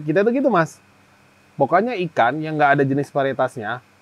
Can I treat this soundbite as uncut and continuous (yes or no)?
yes